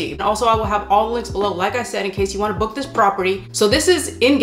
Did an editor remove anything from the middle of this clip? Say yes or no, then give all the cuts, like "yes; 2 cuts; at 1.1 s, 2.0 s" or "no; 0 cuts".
yes; 1 cut; at 3.5 s